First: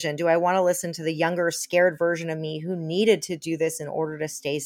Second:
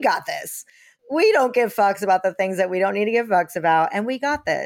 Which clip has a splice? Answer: second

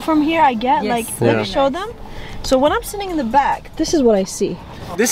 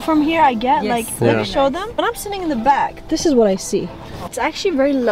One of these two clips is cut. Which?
second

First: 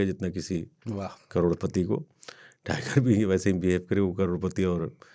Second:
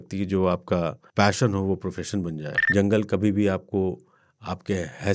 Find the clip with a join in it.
second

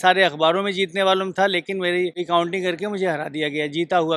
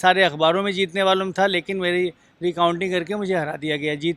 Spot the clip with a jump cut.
first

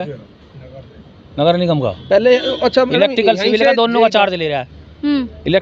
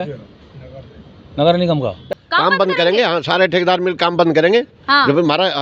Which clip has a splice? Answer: second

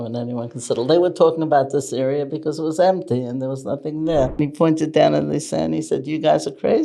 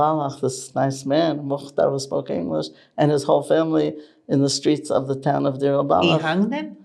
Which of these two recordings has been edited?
first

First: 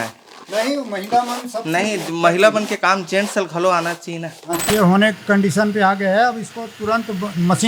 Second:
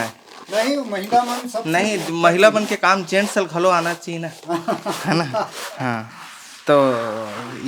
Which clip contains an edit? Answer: first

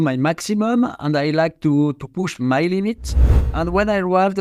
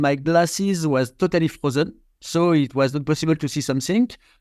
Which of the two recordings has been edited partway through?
first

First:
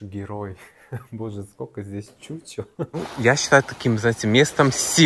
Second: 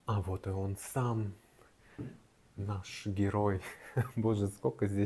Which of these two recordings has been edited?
first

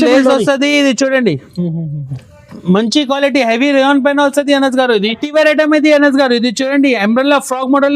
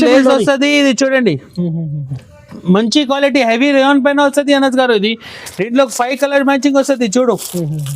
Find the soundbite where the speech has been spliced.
first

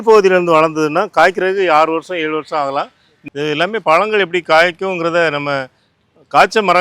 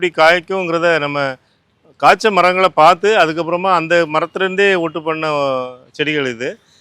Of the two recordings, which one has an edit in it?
first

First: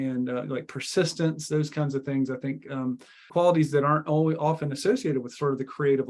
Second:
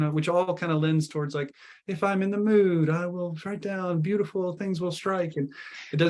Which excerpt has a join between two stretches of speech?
first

